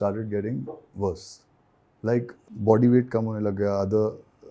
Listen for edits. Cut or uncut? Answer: cut